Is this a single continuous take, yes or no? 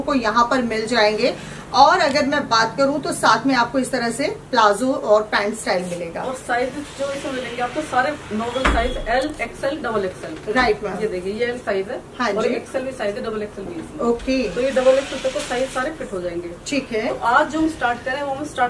yes